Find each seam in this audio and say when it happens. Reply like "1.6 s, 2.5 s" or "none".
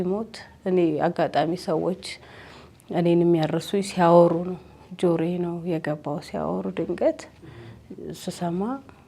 none